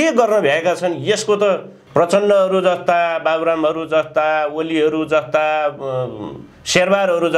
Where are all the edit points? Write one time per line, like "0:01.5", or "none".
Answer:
0:01.7